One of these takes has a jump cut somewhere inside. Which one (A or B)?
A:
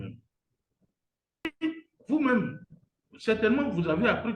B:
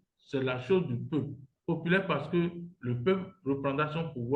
A